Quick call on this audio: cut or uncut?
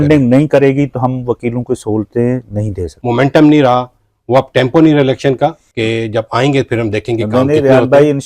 cut